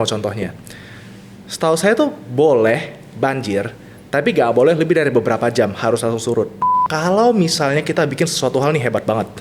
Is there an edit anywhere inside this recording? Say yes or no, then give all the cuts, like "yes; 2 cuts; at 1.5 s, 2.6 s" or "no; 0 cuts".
yes; 1 cut; at 6.7 s